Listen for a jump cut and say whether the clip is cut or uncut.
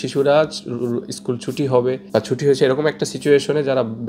cut